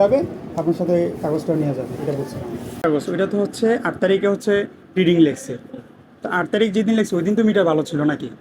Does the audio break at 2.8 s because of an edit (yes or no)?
yes